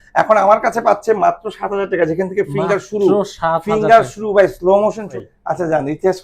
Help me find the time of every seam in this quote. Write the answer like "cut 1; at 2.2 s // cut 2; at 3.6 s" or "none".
cut 1; at 5.1 s

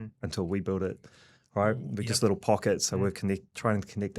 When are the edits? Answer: none

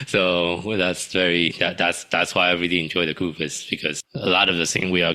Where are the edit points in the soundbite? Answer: cut 1; at 4.1 s

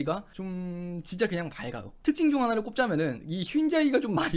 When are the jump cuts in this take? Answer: none

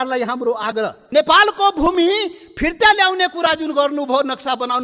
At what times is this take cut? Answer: cut 1; at 1.0 s

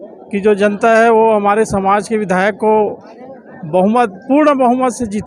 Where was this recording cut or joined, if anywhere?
none

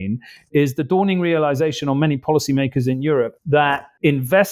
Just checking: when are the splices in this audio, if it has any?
cut 1; at 3.4 s

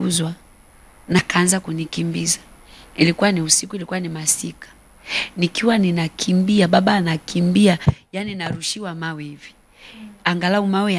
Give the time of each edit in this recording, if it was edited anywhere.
cut 1; at 1.2 s

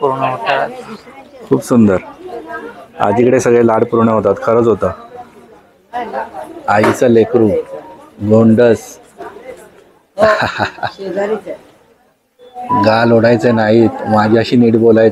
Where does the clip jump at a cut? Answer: none

